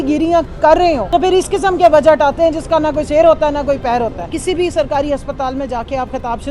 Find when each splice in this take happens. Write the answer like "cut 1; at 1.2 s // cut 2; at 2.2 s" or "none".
cut 1; at 1.0 s // cut 2; at 4.3 s